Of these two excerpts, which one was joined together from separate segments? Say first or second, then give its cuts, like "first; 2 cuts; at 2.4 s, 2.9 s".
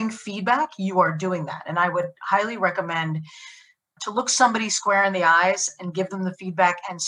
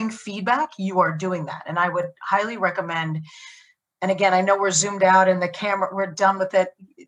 first; 1 cut; at 3.8 s